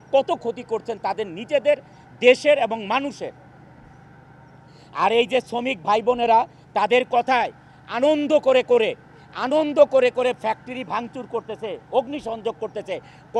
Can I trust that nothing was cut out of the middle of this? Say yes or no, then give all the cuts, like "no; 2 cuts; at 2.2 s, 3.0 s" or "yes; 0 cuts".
yes; 0 cuts